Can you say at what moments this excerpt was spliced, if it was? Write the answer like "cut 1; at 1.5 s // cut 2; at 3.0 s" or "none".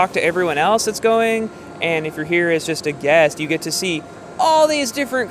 none